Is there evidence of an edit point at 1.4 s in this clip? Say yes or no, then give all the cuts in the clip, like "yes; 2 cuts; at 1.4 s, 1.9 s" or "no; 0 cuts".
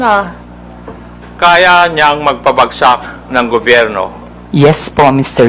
no; 1 cut; at 4.3 s